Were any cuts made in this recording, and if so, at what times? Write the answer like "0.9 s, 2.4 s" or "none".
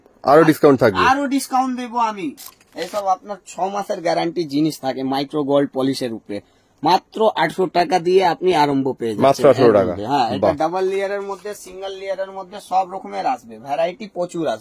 2.4 s

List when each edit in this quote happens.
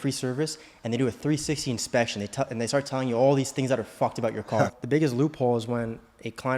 4.7 s

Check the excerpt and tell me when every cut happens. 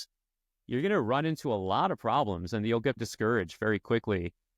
3.0 s

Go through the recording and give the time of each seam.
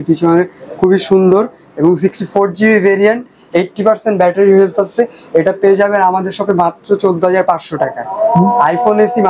none

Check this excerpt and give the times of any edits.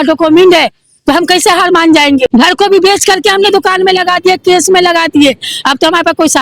2.3 s

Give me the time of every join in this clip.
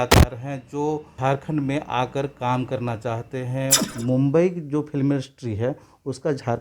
1.1 s, 3.9 s

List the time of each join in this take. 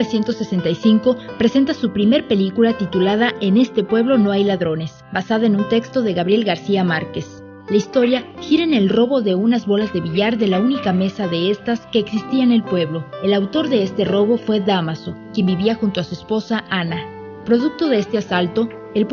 3.9 s

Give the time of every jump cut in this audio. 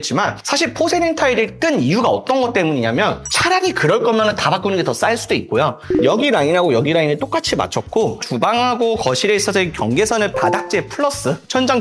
3.2 s, 5.8 s

